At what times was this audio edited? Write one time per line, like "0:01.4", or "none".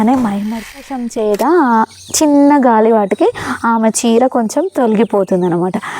0:00.9